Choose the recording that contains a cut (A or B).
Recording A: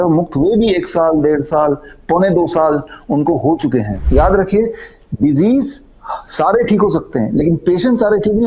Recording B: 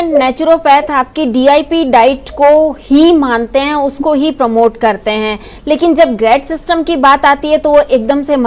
A